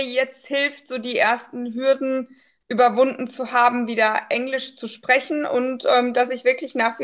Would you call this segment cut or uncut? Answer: uncut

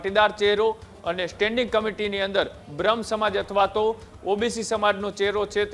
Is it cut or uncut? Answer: uncut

